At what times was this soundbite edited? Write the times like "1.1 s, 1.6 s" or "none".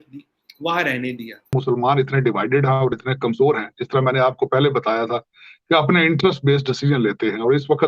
1.5 s